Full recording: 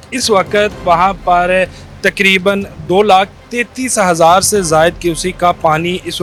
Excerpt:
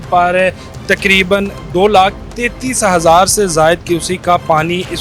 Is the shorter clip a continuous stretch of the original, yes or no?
yes